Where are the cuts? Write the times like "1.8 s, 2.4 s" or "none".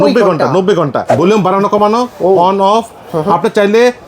1.1 s